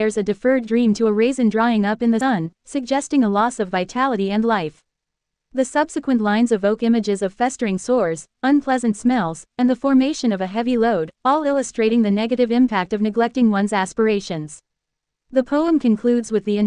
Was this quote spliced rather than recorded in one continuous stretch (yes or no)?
yes